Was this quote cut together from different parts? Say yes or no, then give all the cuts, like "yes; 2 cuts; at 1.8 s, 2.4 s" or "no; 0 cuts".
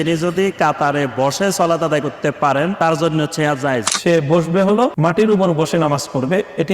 yes; 3 cuts; at 2.7 s, 3.9 s, 4.9 s